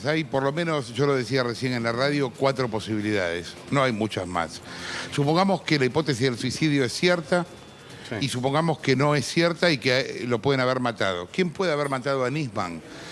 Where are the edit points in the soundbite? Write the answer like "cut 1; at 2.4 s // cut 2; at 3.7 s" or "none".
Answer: none